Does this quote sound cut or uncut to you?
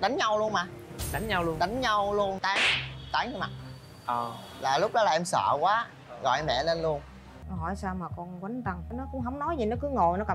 cut